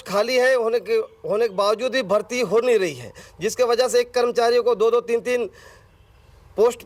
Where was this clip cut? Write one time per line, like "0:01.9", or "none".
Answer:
none